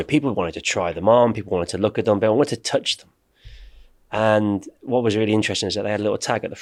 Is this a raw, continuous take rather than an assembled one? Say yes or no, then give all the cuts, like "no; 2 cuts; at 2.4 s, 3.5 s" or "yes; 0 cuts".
yes; 0 cuts